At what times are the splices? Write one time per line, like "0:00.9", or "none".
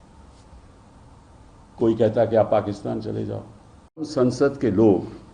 0:04.1